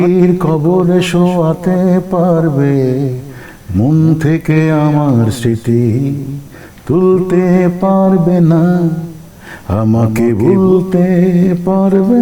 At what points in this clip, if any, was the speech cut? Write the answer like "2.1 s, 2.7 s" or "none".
none